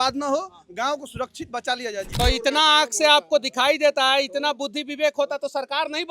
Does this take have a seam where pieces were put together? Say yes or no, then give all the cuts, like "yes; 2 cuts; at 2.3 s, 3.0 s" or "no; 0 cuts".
yes; 1 cut; at 2.1 s